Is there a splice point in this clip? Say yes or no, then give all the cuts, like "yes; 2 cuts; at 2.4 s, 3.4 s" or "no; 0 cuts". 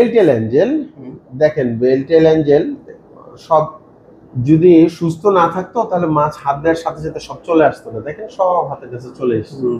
no; 0 cuts